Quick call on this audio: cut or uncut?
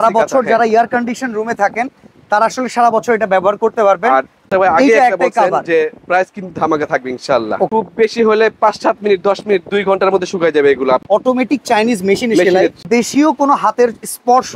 cut